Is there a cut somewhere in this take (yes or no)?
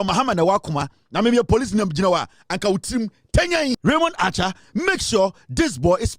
yes